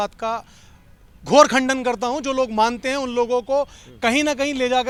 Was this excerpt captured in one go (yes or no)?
yes